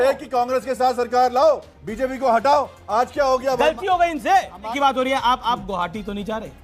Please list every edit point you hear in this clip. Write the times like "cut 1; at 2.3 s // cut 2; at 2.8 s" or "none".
cut 1; at 4.7 s

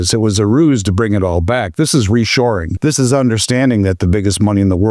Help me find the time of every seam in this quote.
cut 1; at 2.7 s

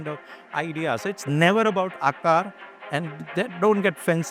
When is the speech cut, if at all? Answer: none

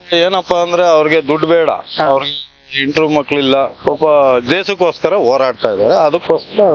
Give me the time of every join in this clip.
none

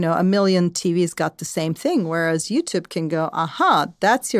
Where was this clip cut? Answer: none

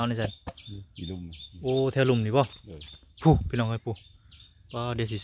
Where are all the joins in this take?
none

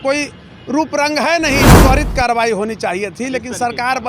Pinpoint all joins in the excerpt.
cut 1; at 1.8 s

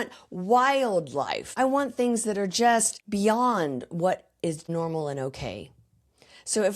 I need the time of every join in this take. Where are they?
cut 1; at 1.5 s // cut 2; at 3.0 s // cut 3; at 4.6 s

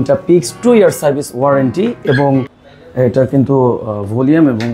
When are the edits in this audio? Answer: cut 1; at 2.6 s

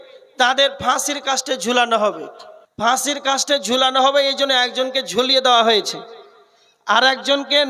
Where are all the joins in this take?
cut 1; at 2.8 s

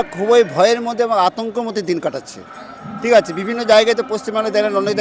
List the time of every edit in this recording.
none

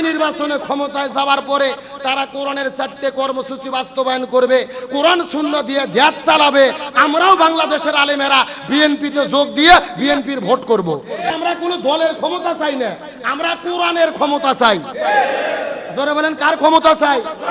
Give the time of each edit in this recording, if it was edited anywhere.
cut 1; at 11.3 s

